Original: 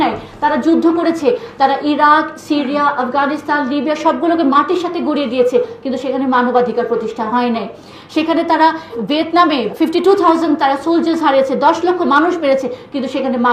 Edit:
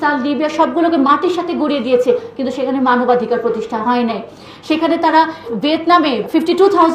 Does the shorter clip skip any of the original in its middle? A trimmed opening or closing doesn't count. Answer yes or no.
no